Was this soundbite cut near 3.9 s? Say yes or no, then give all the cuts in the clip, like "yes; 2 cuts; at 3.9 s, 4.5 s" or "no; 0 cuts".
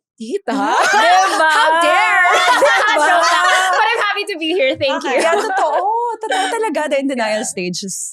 no; 0 cuts